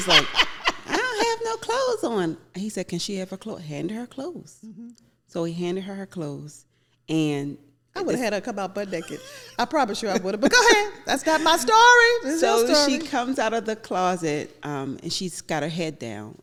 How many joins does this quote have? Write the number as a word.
zero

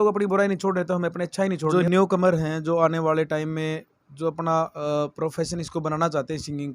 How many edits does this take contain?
one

